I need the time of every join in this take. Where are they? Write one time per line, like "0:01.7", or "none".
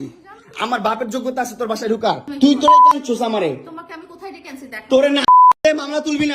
0:02.3